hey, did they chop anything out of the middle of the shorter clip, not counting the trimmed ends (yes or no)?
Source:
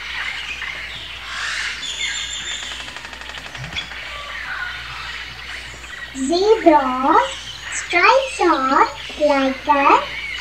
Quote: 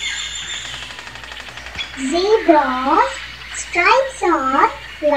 yes